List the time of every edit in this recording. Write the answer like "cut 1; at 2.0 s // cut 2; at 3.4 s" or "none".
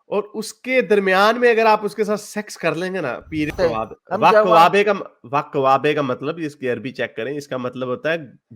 cut 1; at 3.5 s